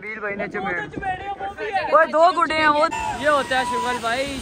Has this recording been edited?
yes; 1 cut; at 2.9 s

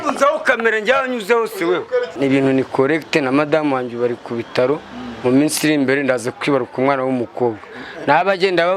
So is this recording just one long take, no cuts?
no; 1 cut; at 2.2 s

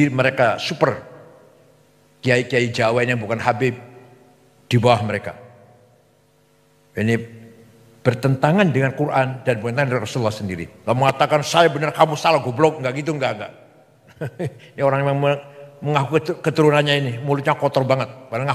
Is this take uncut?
no; 1 cut; at 10.7 s

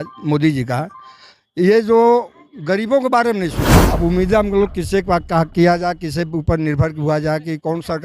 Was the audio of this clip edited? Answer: yes; 1 cut; at 3.8 s

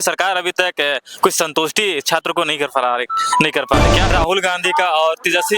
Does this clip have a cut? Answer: yes; 1 cut; at 4.1 s

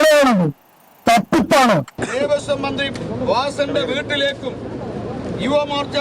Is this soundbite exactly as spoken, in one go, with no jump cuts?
no; 1 cut; at 2.0 s

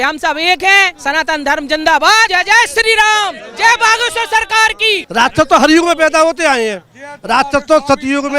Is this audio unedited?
no; 2 cuts; at 2.3 s, 5.0 s

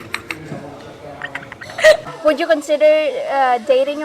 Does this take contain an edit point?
yes; 1 cut; at 2.1 s

